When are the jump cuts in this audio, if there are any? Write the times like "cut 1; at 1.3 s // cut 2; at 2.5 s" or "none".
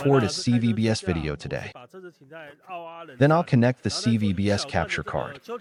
none